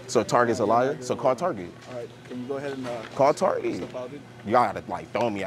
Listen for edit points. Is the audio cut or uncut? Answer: uncut